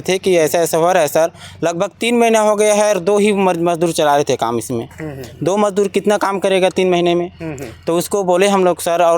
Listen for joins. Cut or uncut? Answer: uncut